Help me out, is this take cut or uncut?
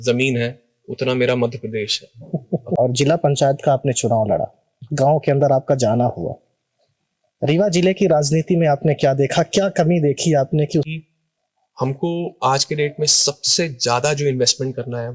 cut